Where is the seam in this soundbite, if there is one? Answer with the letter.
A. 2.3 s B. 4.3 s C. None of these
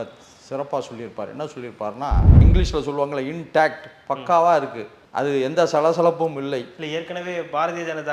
A